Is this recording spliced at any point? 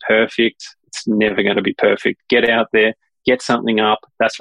no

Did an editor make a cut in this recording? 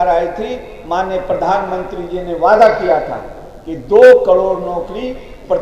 no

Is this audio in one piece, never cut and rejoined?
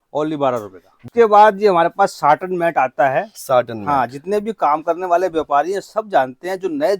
no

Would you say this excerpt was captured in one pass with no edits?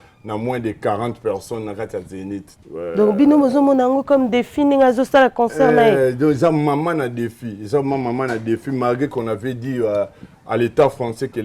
no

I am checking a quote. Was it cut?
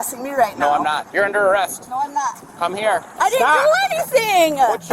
yes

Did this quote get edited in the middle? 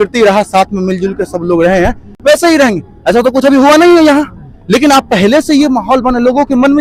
no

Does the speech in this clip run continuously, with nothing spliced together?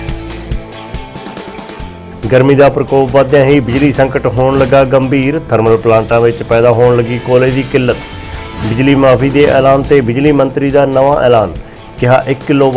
no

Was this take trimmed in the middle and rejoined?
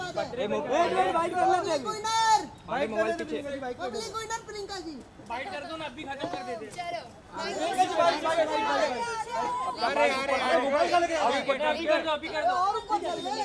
no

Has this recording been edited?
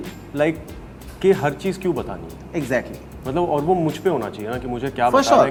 no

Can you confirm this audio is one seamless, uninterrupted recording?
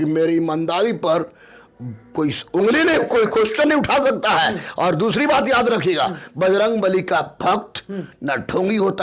yes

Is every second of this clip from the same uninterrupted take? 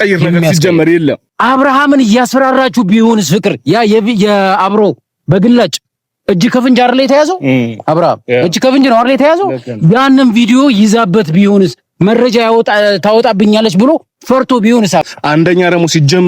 no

